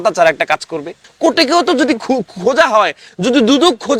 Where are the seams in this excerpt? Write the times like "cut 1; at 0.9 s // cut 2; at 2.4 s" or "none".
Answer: cut 1; at 1.1 s